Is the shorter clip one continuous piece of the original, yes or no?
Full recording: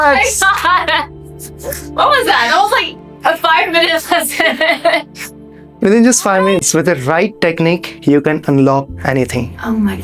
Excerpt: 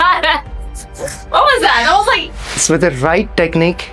no